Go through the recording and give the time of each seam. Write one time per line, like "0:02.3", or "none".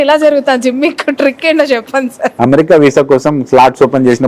0:02.4